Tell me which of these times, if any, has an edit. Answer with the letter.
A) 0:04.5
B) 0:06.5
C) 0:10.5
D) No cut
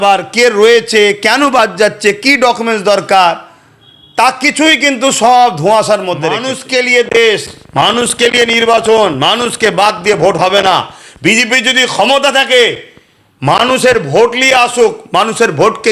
B